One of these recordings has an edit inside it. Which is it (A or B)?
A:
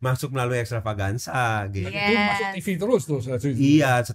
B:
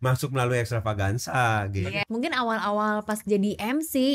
B